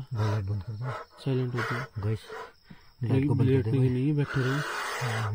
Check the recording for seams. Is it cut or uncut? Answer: uncut